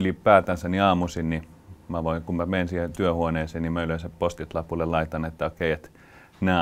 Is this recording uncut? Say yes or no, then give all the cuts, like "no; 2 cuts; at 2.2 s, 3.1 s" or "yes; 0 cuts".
yes; 0 cuts